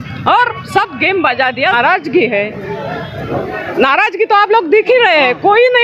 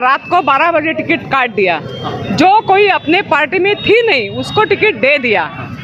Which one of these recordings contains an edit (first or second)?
first